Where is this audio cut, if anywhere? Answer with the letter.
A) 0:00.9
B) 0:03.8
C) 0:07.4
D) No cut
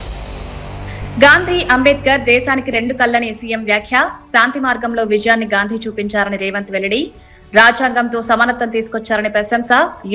D